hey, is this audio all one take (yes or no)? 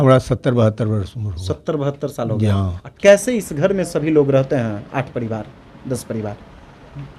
no